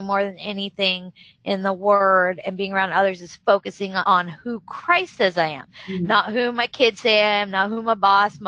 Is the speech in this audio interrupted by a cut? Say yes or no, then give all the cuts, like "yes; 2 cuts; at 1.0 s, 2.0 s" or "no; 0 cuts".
no; 0 cuts